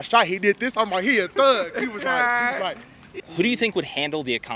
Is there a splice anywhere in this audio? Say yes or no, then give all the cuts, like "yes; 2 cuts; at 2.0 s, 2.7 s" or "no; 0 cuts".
no; 0 cuts